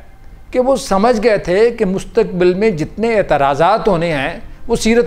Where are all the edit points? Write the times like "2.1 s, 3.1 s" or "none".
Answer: none